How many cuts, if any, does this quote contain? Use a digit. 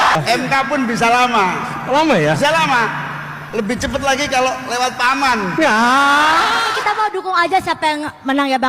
1